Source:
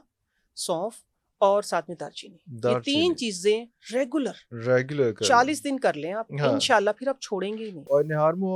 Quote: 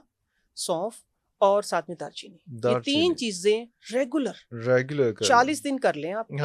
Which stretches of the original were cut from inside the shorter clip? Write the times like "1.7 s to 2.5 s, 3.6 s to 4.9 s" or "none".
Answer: none